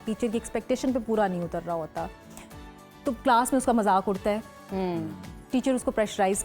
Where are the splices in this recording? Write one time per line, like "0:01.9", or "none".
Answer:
none